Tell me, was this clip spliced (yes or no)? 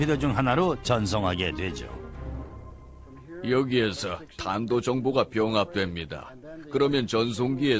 yes